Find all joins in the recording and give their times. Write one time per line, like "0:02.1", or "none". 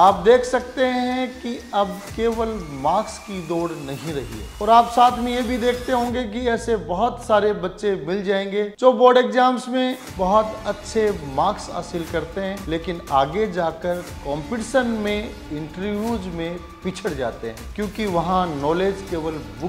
0:02.0
0:04.4
0:08.7
0:12.6
0:17.6